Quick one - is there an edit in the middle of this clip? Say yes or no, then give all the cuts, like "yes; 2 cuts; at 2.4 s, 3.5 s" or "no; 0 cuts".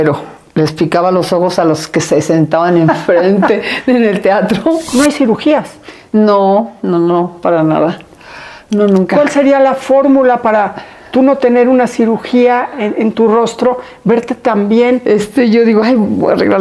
yes; 2 cuts; at 4.8 s, 15.0 s